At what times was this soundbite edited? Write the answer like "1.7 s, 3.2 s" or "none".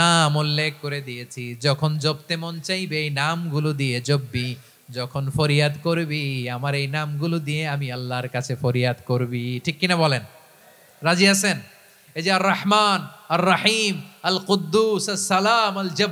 none